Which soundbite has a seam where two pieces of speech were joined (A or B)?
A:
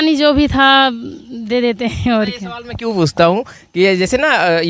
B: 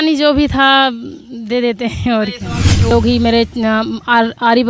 B